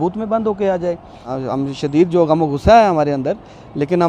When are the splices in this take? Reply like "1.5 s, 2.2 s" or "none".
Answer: 1.3 s